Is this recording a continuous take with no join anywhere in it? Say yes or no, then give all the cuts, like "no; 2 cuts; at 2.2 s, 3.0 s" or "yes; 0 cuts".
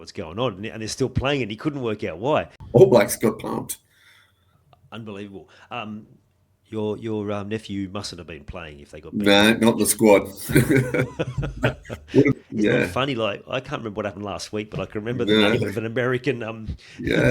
no; 2 cuts; at 2.5 s, 12.3 s